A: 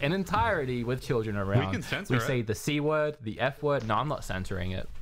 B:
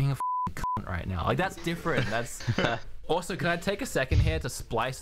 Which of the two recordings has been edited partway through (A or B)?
B